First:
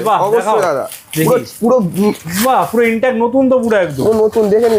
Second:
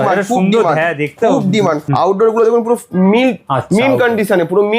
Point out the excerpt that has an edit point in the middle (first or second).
second